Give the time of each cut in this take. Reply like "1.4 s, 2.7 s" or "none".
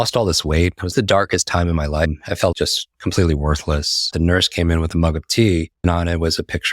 0.9 s, 2.4 s, 4.1 s, 5.7 s